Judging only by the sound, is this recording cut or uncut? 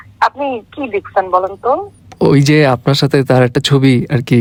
uncut